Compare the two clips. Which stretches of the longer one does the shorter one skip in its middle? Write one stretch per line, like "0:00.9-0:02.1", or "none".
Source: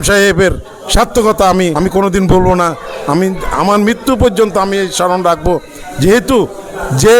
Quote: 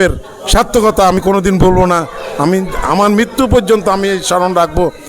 0:01.6-0:01.9